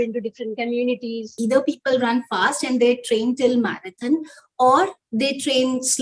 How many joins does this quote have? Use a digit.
1